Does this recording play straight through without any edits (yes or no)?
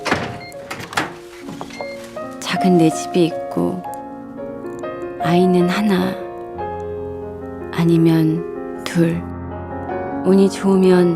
yes